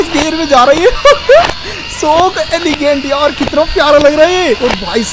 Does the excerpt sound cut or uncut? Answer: uncut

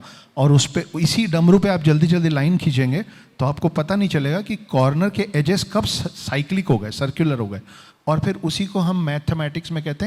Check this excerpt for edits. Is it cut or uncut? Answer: uncut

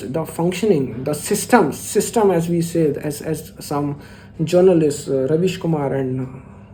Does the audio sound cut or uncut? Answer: uncut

